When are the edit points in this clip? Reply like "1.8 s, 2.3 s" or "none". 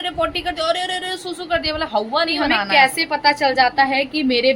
2.7 s

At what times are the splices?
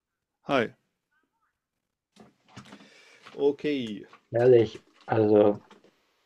2.0 s

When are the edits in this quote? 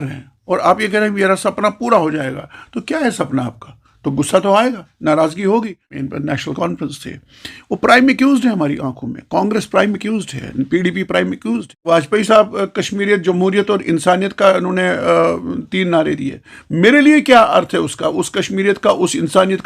6.1 s, 11.9 s

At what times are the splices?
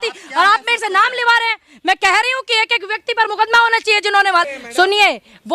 4.5 s

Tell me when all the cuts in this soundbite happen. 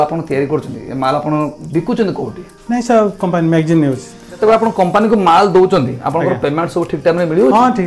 4.3 s

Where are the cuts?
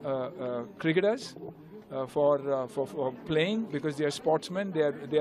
none

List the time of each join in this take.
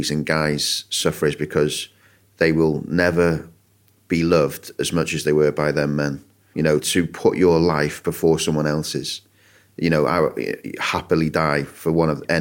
6.8 s

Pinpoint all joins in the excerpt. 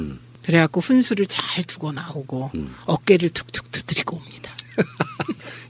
2.4 s

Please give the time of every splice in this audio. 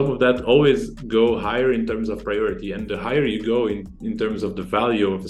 none

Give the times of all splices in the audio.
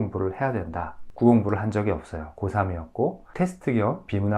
1.0 s, 3.3 s

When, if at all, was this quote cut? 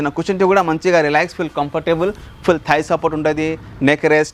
none

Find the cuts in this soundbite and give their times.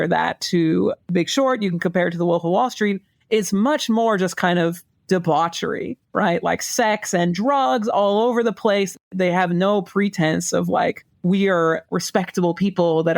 9.0 s

